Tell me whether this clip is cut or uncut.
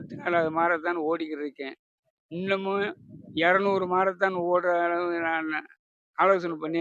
uncut